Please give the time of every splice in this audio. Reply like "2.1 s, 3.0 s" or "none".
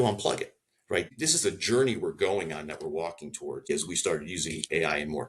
1.1 s, 3.7 s